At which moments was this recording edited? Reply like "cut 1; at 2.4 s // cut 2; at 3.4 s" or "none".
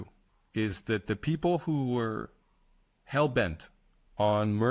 none